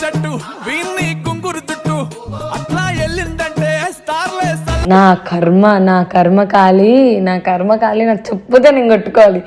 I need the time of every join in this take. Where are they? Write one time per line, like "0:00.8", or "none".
none